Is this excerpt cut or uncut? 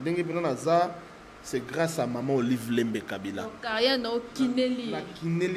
uncut